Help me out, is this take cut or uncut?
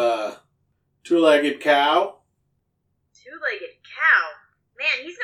uncut